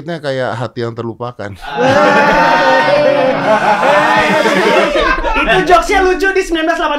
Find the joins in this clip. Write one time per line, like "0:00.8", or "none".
none